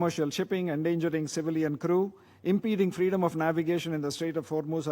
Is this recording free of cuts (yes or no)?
yes